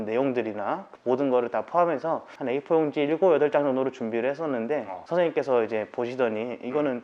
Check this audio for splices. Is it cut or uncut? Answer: cut